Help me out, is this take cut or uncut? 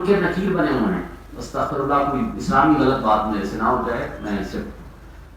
uncut